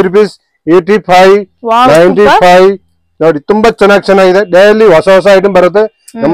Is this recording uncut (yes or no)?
yes